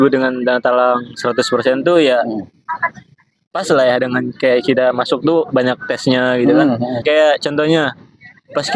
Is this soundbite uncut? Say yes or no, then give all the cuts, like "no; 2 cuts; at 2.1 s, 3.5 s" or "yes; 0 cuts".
no; 1 cut; at 7.0 s